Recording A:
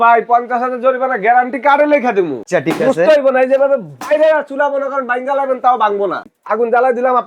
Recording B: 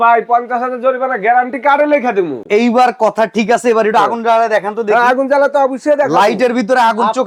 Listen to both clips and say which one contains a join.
A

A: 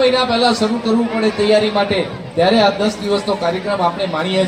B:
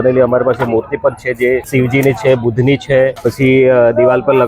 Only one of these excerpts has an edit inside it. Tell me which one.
B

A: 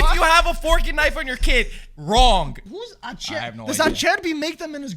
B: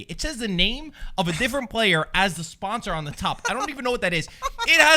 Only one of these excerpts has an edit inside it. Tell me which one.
A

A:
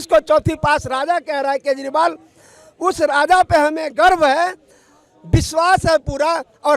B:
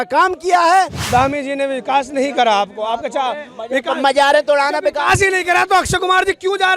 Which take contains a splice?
B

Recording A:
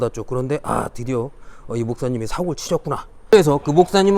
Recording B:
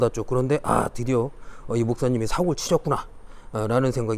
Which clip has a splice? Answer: A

